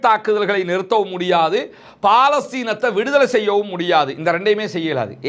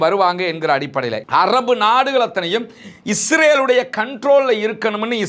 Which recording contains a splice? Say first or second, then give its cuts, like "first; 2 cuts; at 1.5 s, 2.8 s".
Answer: second; 1 cut; at 1.2 s